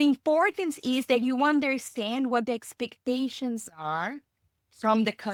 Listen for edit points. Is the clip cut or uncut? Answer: uncut